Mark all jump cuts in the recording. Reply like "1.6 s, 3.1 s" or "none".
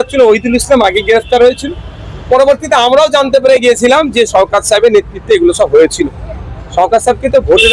none